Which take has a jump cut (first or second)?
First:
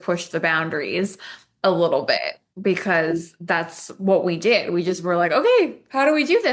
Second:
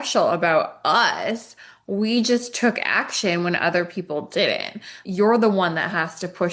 second